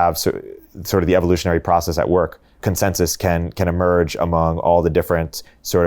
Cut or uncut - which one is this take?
cut